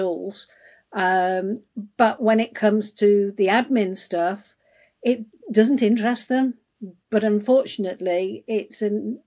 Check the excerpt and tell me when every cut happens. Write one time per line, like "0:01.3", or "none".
none